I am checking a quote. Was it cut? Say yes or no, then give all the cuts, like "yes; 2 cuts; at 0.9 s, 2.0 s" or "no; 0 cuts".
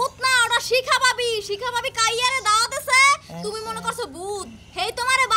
no; 0 cuts